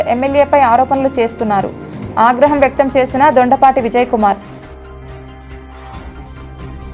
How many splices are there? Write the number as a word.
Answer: one